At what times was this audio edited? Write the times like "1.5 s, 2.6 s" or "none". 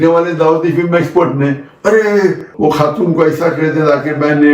2.5 s